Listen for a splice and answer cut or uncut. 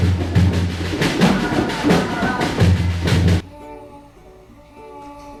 uncut